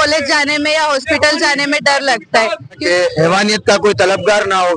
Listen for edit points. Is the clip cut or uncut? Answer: cut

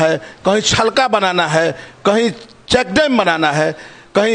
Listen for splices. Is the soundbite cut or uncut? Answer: uncut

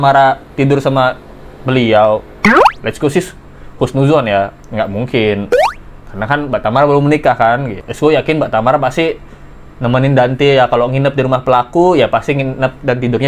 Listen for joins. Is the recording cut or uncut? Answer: uncut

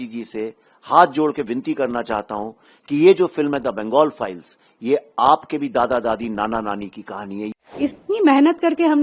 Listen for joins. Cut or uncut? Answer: cut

